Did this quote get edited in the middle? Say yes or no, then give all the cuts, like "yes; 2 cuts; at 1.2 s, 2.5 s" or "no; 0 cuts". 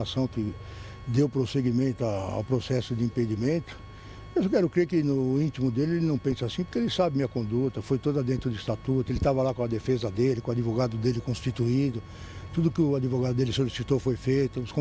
no; 0 cuts